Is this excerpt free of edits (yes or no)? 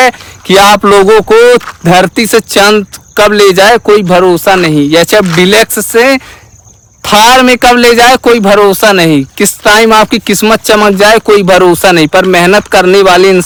yes